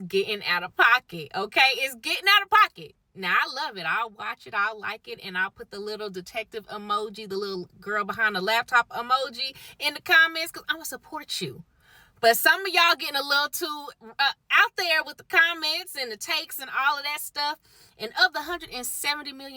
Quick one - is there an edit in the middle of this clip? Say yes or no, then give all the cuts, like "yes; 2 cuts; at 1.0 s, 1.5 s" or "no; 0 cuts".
no; 0 cuts